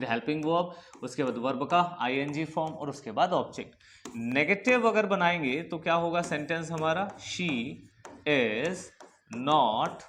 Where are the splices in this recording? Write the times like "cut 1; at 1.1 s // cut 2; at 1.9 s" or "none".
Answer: none